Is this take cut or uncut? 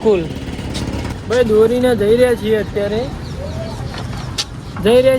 cut